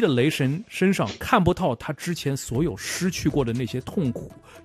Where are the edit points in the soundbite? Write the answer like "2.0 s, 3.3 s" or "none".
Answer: none